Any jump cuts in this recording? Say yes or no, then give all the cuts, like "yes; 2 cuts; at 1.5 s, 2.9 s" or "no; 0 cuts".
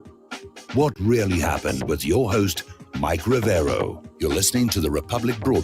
yes; 1 cut; at 4.0 s